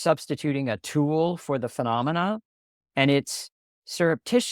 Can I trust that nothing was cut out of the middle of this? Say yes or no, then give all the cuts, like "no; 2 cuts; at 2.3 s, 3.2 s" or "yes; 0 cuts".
yes; 0 cuts